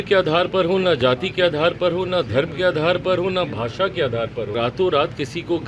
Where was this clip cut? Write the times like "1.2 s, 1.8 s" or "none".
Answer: 4.5 s